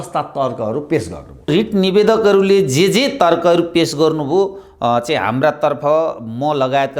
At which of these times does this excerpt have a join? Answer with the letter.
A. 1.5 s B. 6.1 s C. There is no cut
A